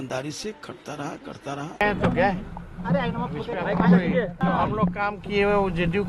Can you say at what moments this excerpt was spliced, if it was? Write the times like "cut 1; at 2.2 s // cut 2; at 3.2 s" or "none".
cut 1; at 1.7 s